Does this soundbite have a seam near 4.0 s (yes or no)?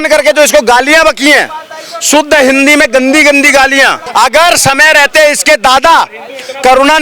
yes